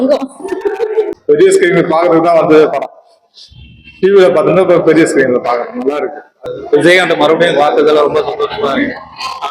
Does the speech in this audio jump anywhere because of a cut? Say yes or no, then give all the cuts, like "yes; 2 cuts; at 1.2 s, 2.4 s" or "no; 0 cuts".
yes; 2 cuts; at 1.1 s, 6.3 s